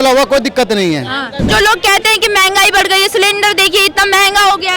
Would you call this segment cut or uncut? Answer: cut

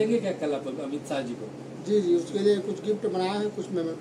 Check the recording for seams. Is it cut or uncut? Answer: uncut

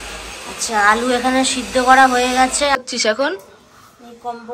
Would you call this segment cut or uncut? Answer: cut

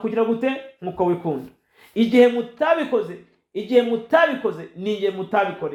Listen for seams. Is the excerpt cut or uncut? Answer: uncut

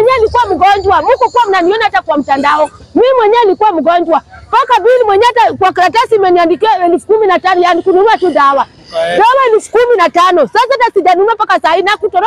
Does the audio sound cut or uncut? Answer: uncut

